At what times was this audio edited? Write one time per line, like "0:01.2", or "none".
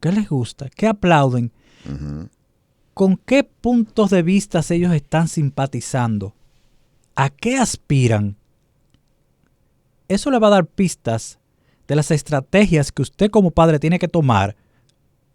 none